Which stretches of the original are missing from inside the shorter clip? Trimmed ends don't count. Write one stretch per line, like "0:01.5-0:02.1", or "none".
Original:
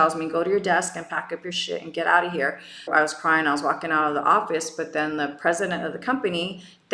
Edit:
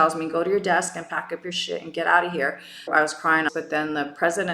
0:03.5-0:04.7